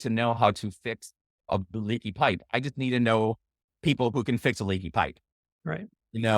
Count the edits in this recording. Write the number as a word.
one